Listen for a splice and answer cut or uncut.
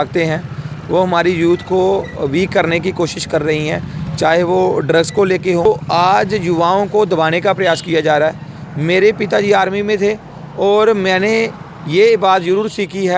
cut